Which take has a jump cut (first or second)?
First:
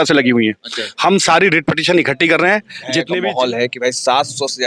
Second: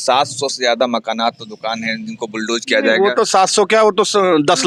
first